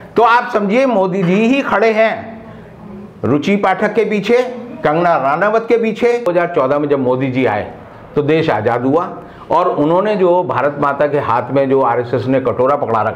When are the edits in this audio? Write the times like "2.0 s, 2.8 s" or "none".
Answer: 6.3 s